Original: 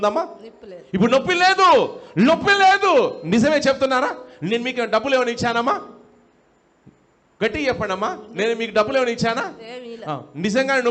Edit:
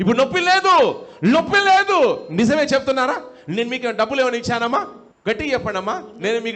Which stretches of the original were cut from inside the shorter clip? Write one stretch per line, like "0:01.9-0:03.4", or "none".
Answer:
0:06.0-0:07.2